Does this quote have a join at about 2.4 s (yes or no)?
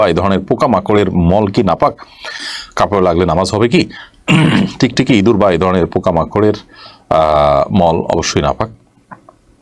no